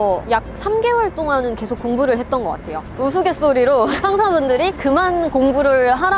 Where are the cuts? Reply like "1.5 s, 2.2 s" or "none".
none